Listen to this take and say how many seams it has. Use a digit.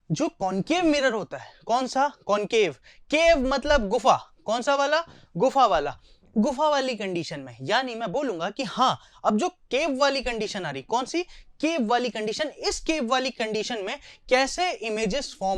0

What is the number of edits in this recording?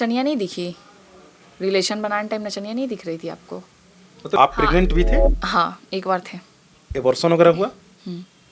1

